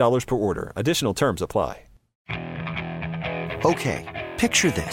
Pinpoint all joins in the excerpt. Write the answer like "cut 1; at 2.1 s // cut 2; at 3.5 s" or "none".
cut 1; at 2.1 s